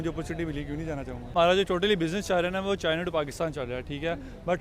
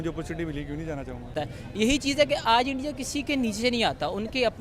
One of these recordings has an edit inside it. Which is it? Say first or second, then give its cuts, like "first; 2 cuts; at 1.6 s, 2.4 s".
first; 1 cut; at 1.3 s